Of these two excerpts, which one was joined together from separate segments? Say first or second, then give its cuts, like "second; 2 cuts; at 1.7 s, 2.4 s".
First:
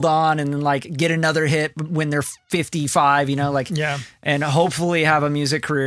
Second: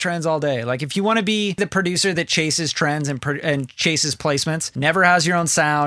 second; 2 cuts; at 1.6 s, 4.7 s